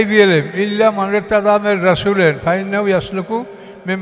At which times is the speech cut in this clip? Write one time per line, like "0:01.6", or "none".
none